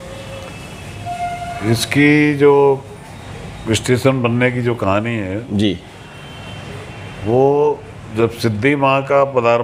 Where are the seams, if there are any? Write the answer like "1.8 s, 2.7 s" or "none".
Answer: none

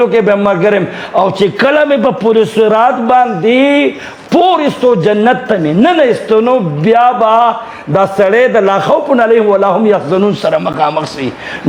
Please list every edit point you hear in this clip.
none

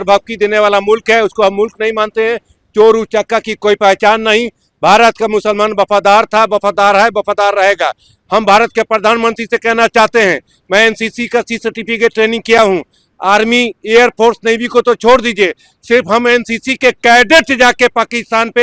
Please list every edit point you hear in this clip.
none

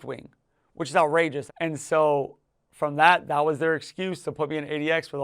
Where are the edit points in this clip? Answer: 1.5 s

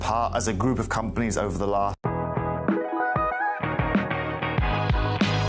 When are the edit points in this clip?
2.0 s

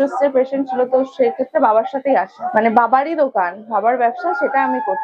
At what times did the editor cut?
2.4 s

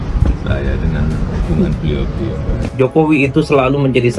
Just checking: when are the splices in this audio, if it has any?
2.7 s

